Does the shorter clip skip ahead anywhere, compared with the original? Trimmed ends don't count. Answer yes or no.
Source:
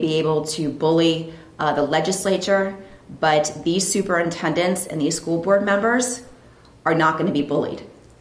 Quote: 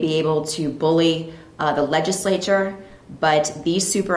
no